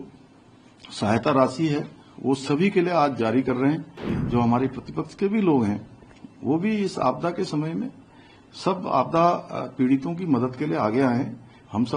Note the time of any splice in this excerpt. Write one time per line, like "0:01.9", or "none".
0:04.2